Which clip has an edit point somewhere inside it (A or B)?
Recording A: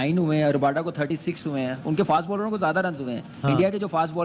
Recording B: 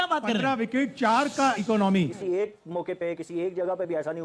B